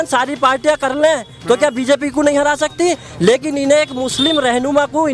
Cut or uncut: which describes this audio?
uncut